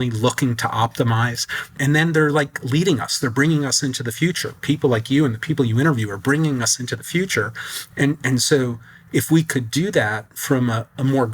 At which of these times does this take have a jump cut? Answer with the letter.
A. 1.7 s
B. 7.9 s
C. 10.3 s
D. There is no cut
A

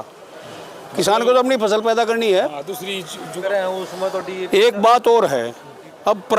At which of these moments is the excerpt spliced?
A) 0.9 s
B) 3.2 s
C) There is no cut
B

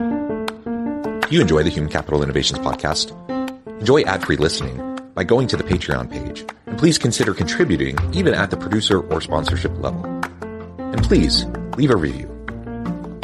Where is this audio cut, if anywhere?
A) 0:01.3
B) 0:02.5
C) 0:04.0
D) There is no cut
A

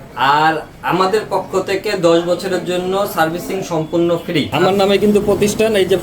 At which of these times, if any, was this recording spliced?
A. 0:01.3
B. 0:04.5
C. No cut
B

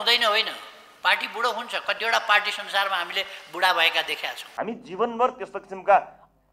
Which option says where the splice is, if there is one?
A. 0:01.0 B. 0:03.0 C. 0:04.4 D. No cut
C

